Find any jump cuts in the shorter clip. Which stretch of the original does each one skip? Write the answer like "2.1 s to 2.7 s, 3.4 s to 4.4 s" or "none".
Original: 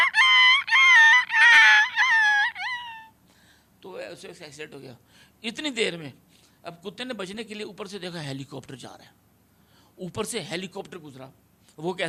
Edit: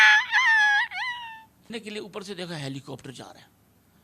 3.3 s to 7.3 s